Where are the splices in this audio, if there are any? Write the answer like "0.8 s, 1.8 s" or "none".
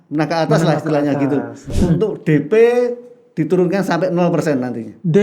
1.7 s